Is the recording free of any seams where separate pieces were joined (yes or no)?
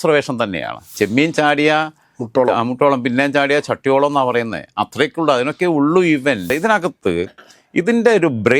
no